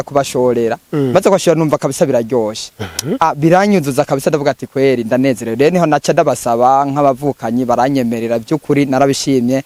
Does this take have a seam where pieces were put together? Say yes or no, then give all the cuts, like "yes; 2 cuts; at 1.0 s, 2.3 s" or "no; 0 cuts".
no; 0 cuts